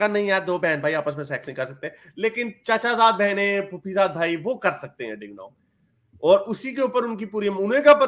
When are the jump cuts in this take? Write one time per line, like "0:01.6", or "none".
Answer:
none